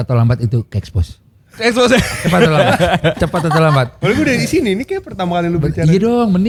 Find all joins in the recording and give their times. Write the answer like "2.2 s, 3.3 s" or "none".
none